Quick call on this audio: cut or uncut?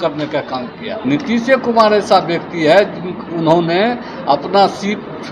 cut